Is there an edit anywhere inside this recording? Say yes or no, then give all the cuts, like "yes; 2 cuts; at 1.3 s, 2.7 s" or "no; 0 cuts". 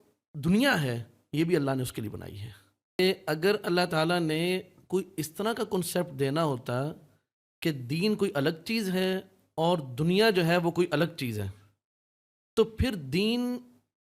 yes; 1 cut; at 3.0 s